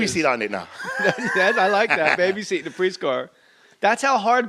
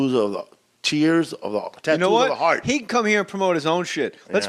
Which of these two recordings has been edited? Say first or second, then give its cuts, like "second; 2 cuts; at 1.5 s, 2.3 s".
first; 1 cut; at 1.4 s